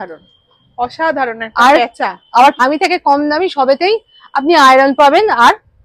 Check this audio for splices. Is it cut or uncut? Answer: cut